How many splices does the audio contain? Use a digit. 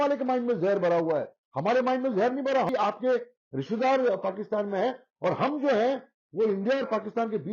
1